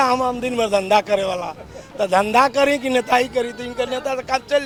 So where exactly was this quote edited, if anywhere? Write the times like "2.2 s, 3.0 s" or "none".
none